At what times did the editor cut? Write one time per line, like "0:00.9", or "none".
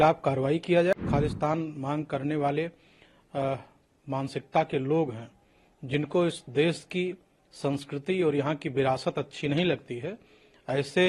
0:01.0